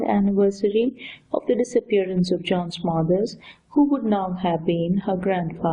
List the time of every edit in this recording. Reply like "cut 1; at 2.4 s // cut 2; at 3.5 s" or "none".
cut 1; at 4.7 s

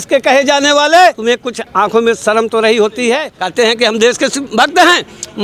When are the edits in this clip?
cut 1; at 1.3 s // cut 2; at 3.4 s // cut 3; at 4.4 s

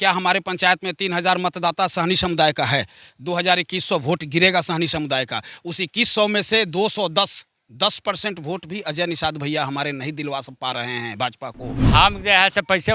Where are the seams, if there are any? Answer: cut 1; at 11.7 s

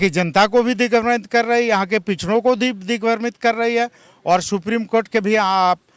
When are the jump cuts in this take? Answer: none

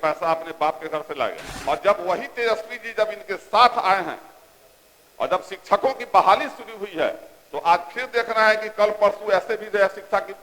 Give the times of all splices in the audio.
cut 1; at 1.5 s

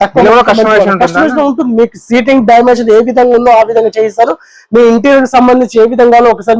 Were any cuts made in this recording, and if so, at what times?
none

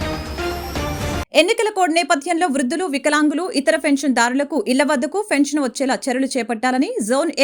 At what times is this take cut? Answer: cut 1; at 1.2 s

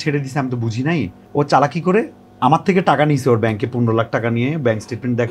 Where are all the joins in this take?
cut 1; at 1.2 s

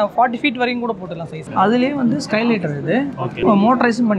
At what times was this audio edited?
cut 1; at 1.5 s // cut 2; at 3.4 s

